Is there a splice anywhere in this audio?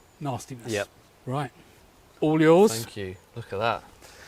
no; 0 cuts

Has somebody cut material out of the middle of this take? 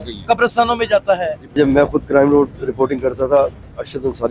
yes; 1 cut; at 1.5 s

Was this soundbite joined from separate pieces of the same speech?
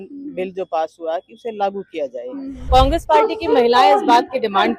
yes; 1 cut; at 2.5 s

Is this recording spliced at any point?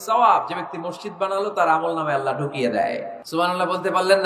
yes; 1 cut; at 3.2 s

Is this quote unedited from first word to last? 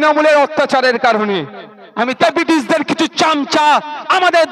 no; 1 cut; at 2.2 s

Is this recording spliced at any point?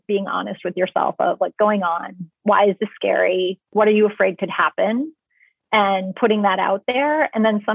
yes; 2 cuts; at 1.5 s, 3.7 s

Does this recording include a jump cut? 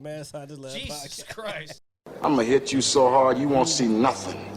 yes; 1 cut; at 1.8 s

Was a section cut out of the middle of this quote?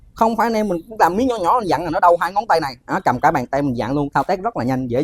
no; 0 cuts

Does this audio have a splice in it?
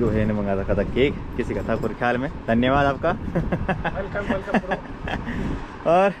no; 0 cuts

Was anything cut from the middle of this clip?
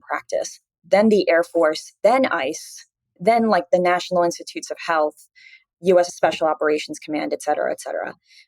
yes; 1 cut; at 6.1 s

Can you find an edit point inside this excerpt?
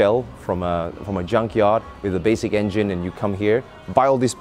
no; 0 cuts

